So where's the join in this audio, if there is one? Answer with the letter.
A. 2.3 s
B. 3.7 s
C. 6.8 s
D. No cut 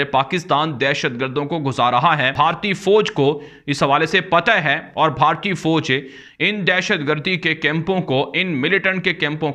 A